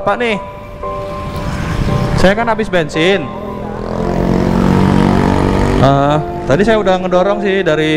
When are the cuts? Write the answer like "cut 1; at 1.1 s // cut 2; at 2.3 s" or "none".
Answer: none